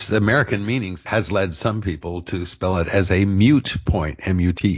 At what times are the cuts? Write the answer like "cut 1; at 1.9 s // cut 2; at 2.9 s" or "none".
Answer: cut 1; at 1.1 s